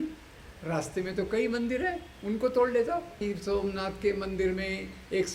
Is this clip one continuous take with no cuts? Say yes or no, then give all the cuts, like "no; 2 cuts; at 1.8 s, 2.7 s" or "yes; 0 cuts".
no; 1 cut; at 3.2 s